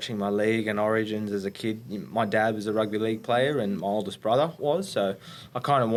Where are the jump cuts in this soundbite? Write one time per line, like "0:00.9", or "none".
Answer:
none